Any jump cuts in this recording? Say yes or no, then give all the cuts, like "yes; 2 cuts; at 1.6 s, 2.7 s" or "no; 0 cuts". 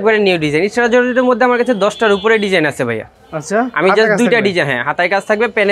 no; 0 cuts